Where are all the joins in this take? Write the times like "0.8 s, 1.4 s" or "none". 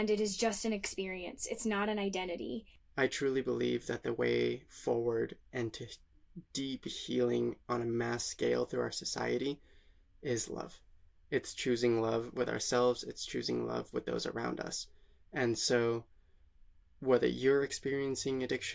2.8 s

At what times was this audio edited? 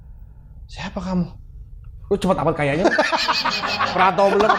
none

